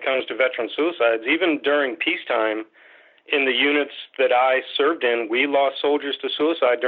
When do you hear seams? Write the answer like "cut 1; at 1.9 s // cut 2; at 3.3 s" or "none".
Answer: none